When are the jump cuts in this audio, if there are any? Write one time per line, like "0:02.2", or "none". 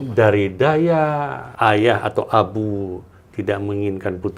0:01.4